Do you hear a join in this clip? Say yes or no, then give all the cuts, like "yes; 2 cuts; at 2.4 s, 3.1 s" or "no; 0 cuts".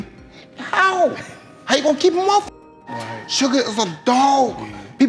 no; 0 cuts